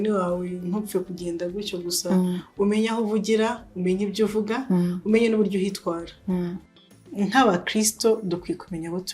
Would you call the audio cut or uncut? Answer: cut